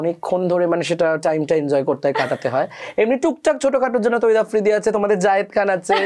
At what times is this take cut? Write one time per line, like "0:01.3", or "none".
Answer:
none